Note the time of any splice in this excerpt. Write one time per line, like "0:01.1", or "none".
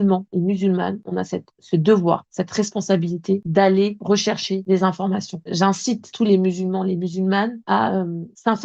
0:05.4